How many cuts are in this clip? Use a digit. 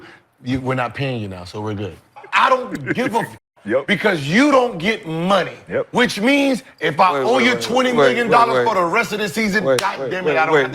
1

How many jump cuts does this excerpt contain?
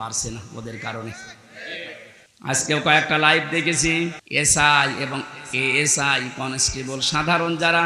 2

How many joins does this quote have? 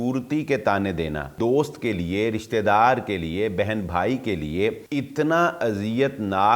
2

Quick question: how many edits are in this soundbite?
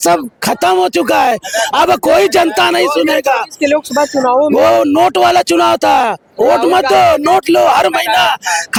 0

